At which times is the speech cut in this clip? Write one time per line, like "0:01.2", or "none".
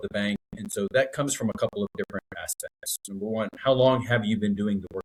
none